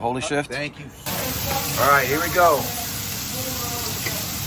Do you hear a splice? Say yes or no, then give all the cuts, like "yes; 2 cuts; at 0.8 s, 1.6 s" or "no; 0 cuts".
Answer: yes; 1 cut; at 0.9 s